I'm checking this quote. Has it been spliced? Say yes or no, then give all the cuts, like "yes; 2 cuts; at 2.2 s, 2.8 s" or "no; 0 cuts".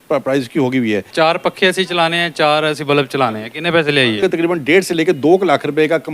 yes; 2 cuts; at 1.1 s, 4.2 s